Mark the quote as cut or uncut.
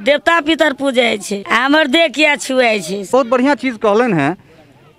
cut